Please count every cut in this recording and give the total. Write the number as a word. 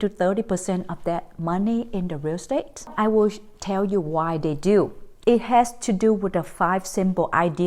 two